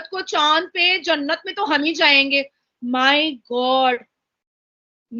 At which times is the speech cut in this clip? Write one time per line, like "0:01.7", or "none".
none